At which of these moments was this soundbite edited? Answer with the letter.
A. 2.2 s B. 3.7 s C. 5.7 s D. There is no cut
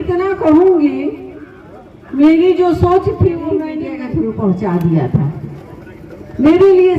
B